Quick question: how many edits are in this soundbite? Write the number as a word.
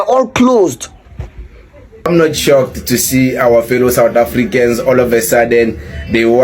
one